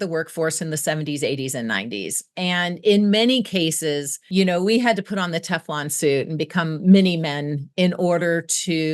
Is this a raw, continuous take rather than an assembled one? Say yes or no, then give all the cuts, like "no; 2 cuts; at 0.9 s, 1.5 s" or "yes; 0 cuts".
yes; 0 cuts